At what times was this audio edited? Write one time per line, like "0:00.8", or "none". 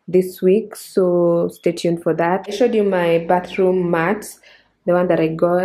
0:02.5